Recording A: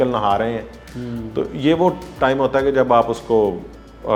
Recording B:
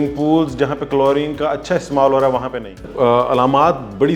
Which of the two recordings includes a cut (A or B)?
B